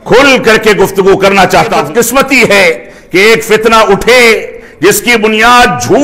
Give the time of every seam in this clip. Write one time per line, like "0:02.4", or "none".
0:01.8